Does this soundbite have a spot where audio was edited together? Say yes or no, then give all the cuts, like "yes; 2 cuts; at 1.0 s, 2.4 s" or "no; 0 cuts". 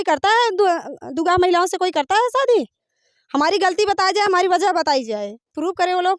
no; 0 cuts